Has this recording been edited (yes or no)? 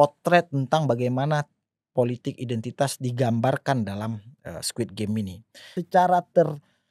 yes